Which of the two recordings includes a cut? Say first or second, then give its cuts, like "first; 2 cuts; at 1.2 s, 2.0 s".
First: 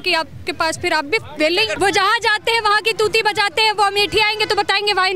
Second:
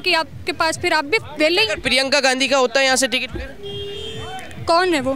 first; 1 cut; at 1.7 s